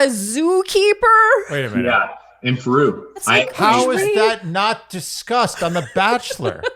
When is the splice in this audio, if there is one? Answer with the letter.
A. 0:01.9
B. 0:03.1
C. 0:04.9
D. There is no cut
B